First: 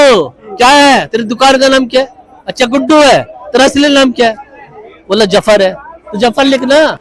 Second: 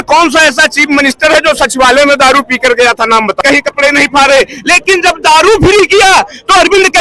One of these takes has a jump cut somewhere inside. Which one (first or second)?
second